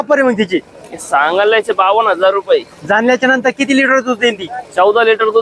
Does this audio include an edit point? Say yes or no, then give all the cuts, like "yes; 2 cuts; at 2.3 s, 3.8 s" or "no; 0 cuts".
no; 0 cuts